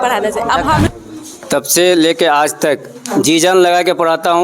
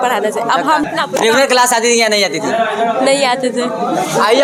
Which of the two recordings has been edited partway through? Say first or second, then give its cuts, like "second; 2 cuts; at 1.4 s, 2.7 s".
first; 1 cut; at 0.9 s